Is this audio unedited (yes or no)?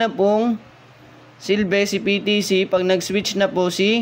yes